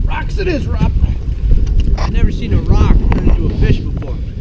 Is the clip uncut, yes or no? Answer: yes